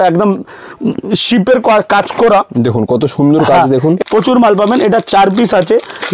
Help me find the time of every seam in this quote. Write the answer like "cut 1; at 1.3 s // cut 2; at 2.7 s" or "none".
cut 1; at 4.0 s